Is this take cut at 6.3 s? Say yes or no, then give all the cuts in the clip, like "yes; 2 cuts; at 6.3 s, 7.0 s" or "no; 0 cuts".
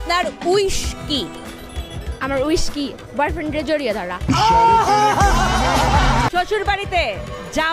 yes; 1 cut; at 6.3 s